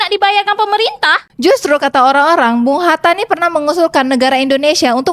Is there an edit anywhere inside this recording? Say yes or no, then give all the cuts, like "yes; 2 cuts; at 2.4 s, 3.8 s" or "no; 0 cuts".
yes; 1 cut; at 1.2 s